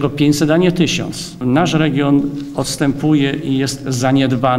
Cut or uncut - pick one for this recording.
cut